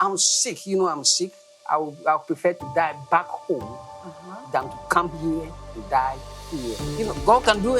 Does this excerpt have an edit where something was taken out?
yes; 1 cut; at 6.8 s

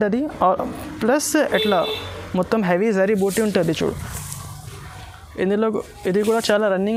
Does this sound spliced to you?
no; 0 cuts

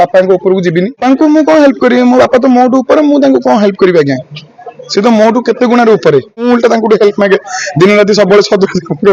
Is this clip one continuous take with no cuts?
no; 2 cuts; at 1.0 s, 6.4 s

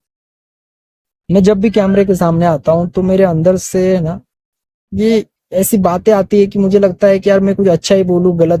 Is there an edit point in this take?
no; 0 cuts

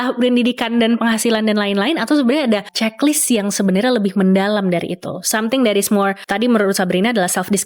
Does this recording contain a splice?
yes; 2 cuts; at 2.7 s, 6.2 s

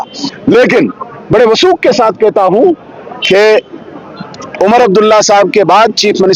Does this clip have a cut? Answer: no; 0 cuts

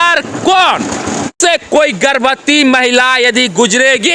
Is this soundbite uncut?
no; 1 cut; at 1.3 s

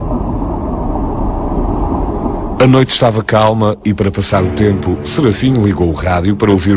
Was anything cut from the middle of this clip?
yes; 1 cut; at 4.0 s

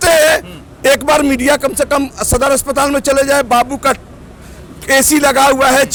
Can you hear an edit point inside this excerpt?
no; 0 cuts

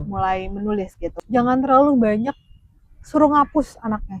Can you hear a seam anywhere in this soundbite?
yes; 1 cut; at 1.2 s

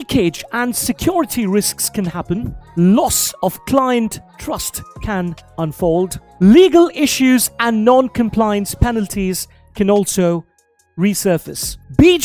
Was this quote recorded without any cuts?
yes; 0 cuts

